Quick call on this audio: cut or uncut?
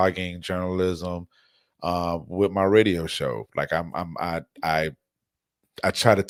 uncut